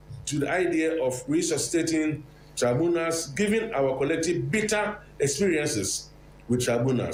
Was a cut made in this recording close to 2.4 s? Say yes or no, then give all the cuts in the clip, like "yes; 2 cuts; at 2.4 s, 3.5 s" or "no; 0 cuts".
no; 0 cuts